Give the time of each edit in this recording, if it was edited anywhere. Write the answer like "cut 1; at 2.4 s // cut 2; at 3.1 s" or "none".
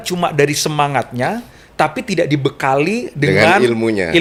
none